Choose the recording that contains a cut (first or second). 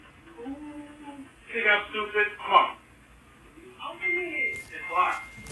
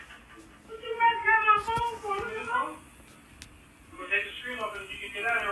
second